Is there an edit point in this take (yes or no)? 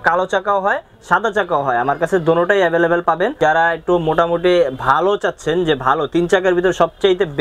yes